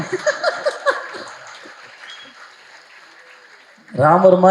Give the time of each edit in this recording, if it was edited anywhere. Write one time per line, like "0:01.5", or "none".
none